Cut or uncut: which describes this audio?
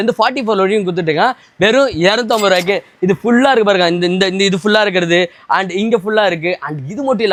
uncut